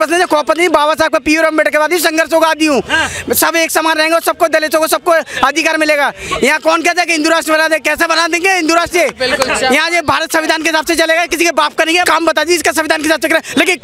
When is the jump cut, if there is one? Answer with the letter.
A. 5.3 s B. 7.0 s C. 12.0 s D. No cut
C